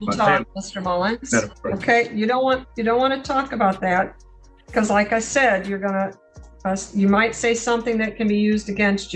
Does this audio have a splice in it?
no; 0 cuts

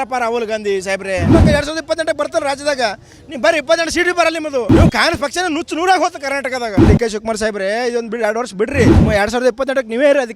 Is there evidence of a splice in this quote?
yes; 4 cuts; at 1.3 s, 4.7 s, 6.8 s, 9.0 s

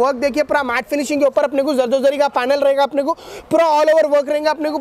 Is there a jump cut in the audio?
no; 0 cuts

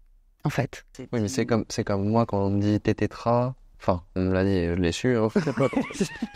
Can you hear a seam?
yes; 2 cuts; at 0.9 s, 3.7 s

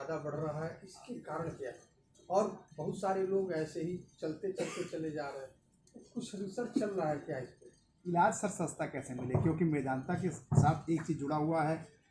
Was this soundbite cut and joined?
yes; 1 cut; at 7.9 s

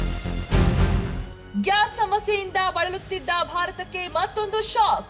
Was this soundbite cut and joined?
yes; 1 cut; at 1.3 s

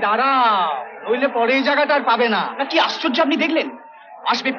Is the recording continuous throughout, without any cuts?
yes; 0 cuts

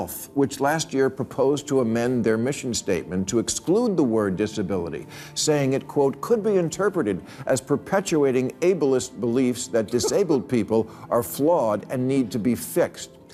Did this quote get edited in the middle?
no; 0 cuts

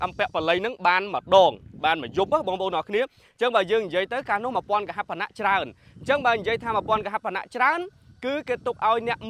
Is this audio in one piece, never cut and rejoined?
yes; 0 cuts

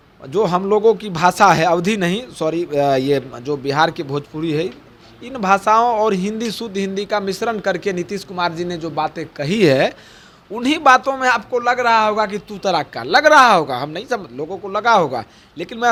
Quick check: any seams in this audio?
no; 0 cuts

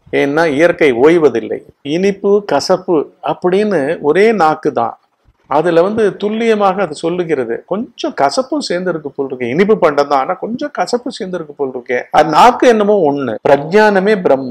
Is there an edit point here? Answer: yes; 3 cuts; at 1.9 s, 12.2 s, 13.3 s

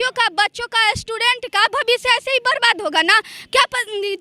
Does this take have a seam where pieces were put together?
no; 0 cuts

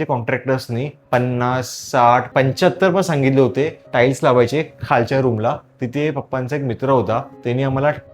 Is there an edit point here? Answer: yes; 2 cuts; at 2.3 s, 7.3 s

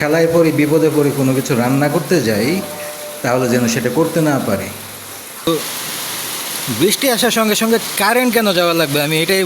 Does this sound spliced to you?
yes; 1 cut; at 5.5 s

